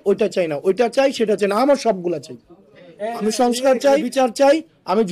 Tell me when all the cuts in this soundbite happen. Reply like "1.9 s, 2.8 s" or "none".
4.1 s